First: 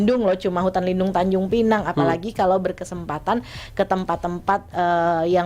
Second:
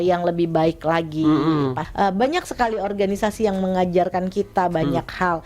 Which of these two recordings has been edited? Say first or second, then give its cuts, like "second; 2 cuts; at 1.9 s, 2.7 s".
second; 1 cut; at 1.8 s